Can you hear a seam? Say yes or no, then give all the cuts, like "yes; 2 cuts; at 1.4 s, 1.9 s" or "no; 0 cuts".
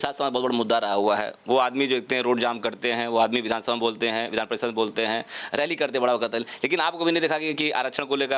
no; 0 cuts